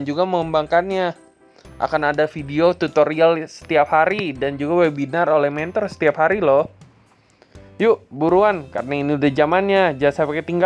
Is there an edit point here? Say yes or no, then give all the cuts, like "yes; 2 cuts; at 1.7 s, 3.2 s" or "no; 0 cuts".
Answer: no; 0 cuts